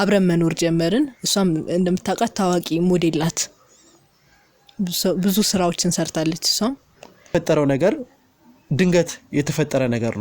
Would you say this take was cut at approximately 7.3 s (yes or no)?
yes